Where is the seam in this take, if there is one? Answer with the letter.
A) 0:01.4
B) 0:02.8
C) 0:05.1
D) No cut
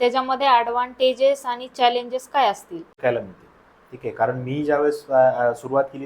B